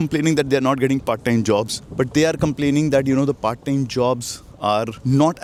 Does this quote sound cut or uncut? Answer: uncut